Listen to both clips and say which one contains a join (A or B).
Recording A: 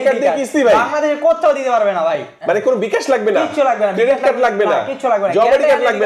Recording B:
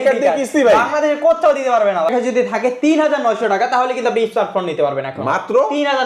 B